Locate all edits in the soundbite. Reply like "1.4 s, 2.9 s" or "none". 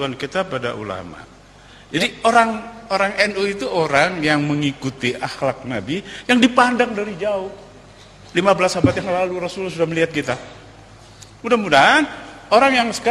1.8 s